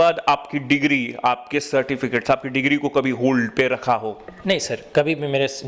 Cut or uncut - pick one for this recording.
uncut